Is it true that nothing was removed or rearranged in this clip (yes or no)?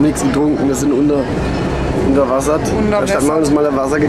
yes